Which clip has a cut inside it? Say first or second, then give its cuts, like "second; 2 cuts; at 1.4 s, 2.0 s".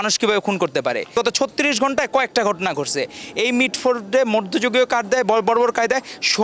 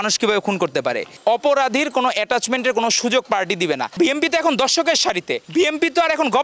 second; 3 cuts; at 1.1 s, 3.9 s, 5.4 s